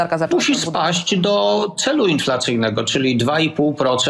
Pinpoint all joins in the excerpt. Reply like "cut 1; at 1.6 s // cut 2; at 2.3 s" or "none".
none